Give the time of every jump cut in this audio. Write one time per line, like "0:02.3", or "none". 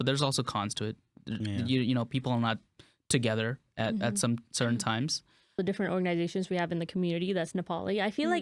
0:05.6